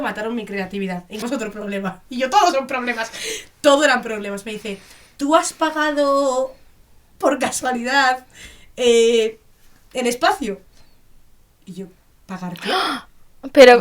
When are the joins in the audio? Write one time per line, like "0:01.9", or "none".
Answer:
0:01.2